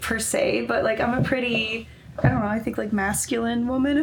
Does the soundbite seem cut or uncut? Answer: uncut